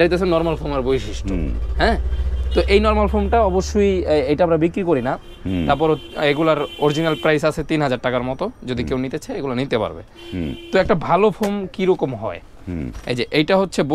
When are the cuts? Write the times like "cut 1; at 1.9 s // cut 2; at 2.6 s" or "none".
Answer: none